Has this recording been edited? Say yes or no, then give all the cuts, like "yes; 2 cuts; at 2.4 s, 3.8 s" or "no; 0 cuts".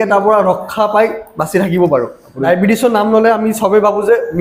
yes; 1 cut; at 2.4 s